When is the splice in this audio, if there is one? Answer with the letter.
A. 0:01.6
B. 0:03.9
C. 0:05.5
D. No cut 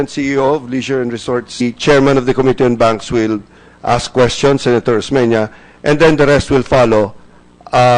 D